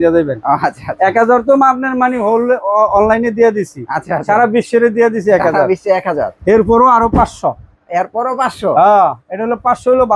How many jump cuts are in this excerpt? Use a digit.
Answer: 0